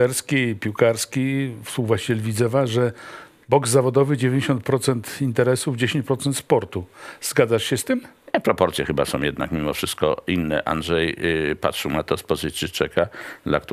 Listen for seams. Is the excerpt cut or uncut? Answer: uncut